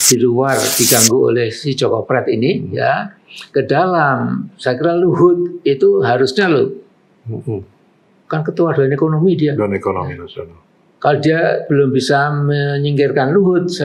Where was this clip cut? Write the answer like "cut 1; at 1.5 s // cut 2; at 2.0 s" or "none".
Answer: none